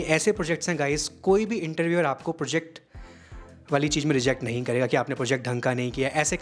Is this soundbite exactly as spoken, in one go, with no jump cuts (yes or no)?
yes